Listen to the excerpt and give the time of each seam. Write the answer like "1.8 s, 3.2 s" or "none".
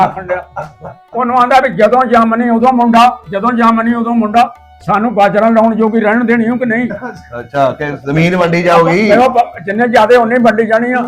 none